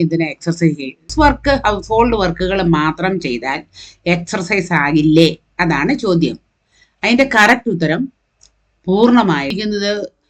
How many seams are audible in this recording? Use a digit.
2